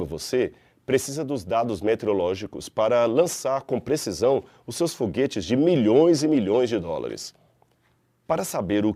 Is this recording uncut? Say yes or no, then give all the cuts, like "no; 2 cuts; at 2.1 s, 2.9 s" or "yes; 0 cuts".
yes; 0 cuts